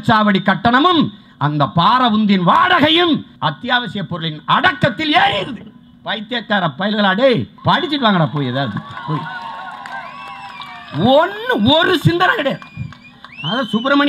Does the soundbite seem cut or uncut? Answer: cut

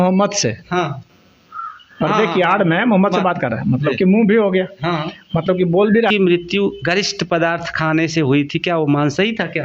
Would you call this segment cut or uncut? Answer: cut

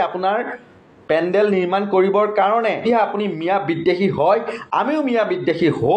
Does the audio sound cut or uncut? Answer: cut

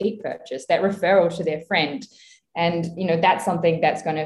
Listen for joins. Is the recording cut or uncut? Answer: uncut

